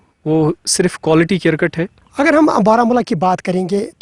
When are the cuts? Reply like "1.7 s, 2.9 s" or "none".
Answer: 2.0 s